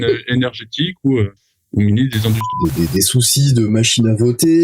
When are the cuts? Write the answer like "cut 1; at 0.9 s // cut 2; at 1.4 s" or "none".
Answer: cut 1; at 2.5 s